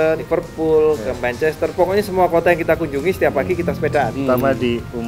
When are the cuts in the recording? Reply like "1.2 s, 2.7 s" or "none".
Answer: 4.1 s